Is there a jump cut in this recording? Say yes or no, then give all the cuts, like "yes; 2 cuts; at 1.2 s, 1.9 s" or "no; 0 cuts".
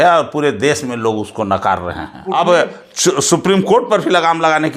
yes; 1 cut; at 2.3 s